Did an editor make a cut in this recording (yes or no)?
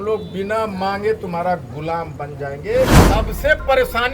yes